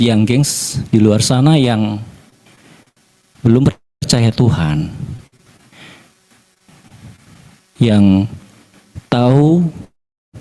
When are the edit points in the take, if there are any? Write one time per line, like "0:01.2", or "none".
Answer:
none